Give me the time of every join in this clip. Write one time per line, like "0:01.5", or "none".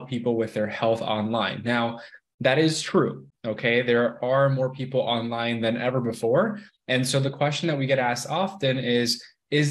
none